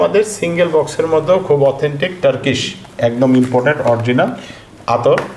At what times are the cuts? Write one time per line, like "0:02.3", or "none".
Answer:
none